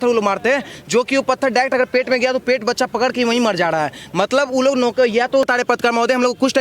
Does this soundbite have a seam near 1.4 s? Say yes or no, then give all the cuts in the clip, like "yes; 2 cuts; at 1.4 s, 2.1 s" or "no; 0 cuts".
no; 1 cut; at 5.5 s